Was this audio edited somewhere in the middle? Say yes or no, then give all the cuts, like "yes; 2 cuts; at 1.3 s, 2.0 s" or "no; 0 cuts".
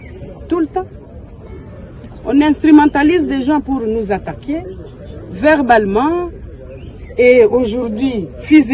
no; 0 cuts